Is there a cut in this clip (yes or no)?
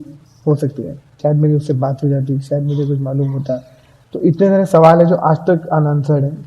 yes